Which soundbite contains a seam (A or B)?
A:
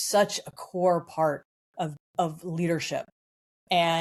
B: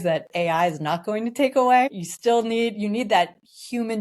B